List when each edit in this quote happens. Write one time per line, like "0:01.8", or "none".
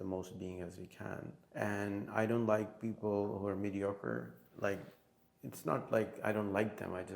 0:01.4